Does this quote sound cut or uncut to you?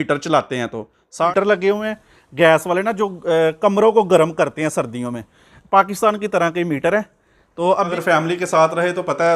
cut